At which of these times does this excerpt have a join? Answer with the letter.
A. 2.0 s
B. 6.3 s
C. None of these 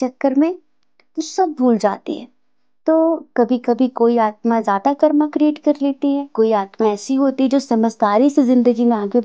B